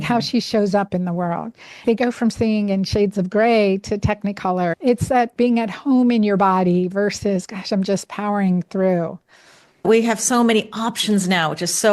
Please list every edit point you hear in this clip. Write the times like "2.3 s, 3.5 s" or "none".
1.8 s, 4.7 s, 9.9 s